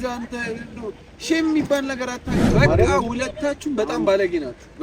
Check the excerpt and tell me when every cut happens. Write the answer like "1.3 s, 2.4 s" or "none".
2.5 s